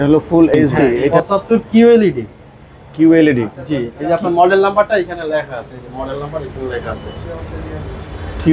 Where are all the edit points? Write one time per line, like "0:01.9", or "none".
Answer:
0:01.1